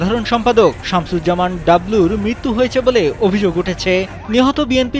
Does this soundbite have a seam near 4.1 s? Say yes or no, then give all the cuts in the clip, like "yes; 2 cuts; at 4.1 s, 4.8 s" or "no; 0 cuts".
yes; 1 cut; at 4.1 s